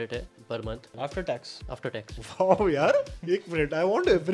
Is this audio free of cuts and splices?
no; 3 cuts; at 0.9 s, 2.2 s, 3.1 s

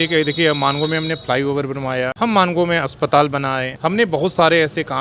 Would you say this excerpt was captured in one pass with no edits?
no; 2 cuts; at 2.1 s, 3.7 s

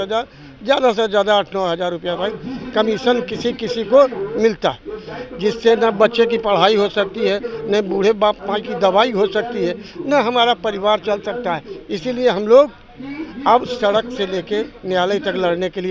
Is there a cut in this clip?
no; 0 cuts

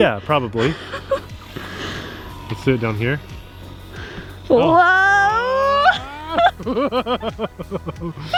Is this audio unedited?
yes; 0 cuts

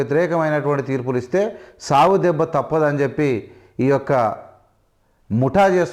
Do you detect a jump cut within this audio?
no; 0 cuts

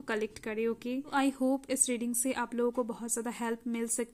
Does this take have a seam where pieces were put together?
yes; 1 cut; at 1.1 s

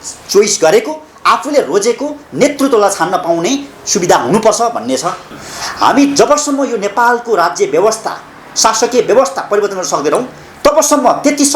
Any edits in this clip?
yes; 1 cut; at 5.3 s

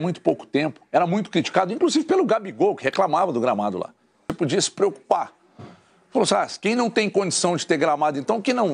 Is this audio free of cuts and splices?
no; 1 cut; at 4.3 s

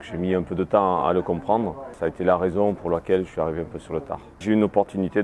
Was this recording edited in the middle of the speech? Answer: yes; 2 cuts; at 1.9 s, 4.3 s

